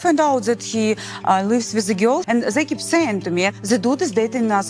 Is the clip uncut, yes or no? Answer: no